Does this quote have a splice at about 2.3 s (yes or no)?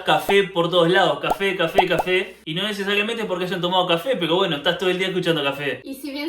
no